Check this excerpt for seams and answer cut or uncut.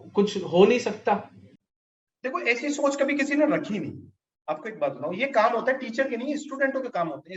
uncut